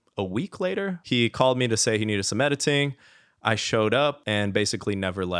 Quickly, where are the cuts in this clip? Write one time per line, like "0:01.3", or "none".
0:01.0
0:04.2